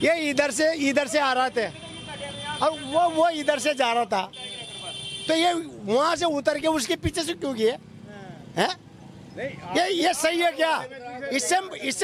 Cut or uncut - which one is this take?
uncut